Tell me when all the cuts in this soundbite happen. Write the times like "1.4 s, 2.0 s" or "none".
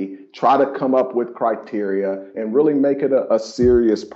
2.3 s, 3.3 s